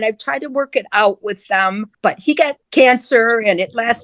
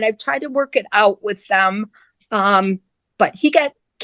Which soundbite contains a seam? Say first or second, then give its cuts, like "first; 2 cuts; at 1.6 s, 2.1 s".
first; 1 cut; at 2.4 s